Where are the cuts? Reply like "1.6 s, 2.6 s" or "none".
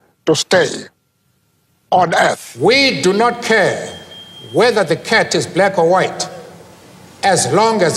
2.5 s